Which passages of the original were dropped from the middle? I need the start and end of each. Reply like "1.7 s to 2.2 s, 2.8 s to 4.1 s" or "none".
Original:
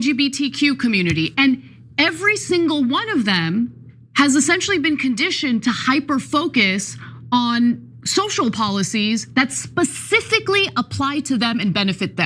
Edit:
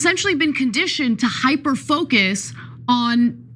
none